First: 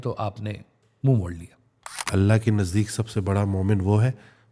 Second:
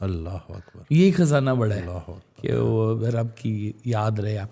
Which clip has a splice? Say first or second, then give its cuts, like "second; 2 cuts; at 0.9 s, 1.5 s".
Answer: first; 1 cut; at 2.1 s